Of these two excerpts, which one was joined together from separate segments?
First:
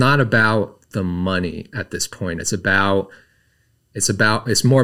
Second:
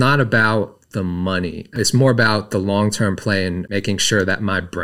second; 2 cuts; at 1.7 s, 3.6 s

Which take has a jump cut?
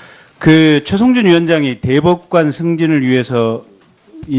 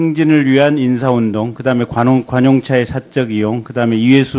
second; 1 cut; at 3.0 s

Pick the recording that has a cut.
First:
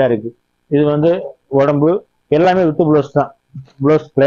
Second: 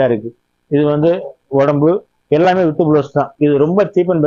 second; 1 cut; at 3.3 s

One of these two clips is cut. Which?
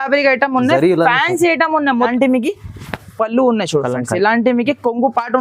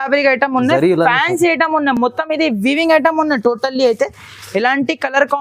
first; 1 cut; at 2.0 s

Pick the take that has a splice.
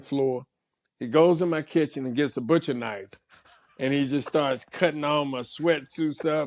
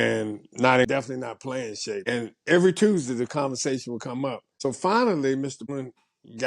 second; 4 cuts; at 0.9 s, 2.0 s, 4.5 s, 5.7 s

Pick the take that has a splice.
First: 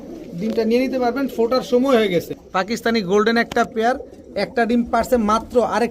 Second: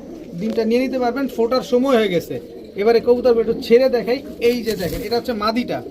first; 1 cut; at 2.4 s

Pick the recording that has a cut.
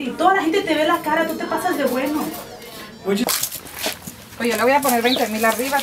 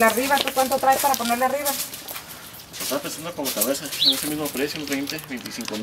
first; 1 cut; at 3.2 s

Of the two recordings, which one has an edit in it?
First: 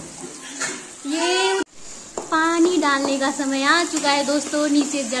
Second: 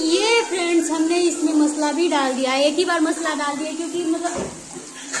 first; 1 cut; at 1.6 s

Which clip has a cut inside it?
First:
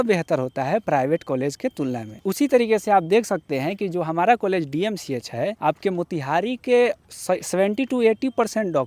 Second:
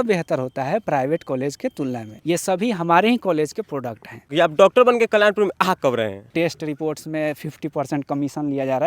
second; 3 cuts; at 2.2 s, 4.3 s, 6.3 s

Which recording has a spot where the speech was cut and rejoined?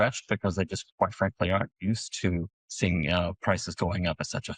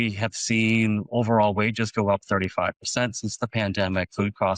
first; 1 cut; at 2.6 s

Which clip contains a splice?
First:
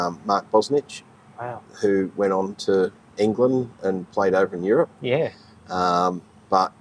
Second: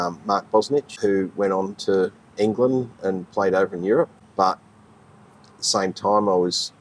second; 2 cuts; at 0.9 s, 4.2 s

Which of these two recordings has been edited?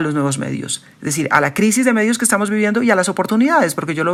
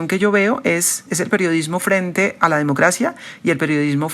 second; 1 cut; at 1.1 s

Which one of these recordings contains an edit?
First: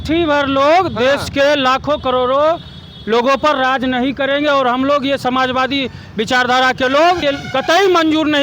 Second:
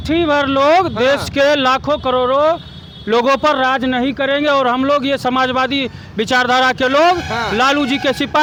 first; 1 cut; at 7.2 s

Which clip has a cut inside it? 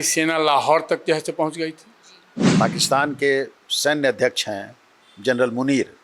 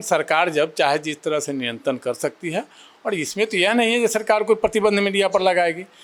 first; 1 cut; at 2.4 s

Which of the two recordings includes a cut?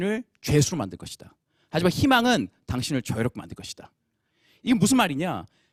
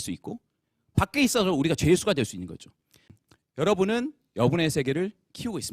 second; 1 cut; at 3.1 s

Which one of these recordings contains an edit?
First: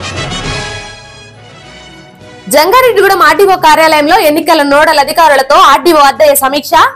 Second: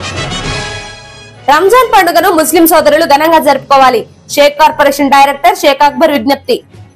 first; 1 cut; at 1.3 s

